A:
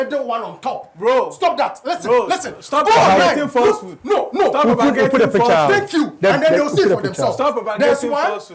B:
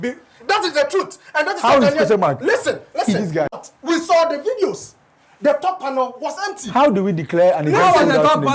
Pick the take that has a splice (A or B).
B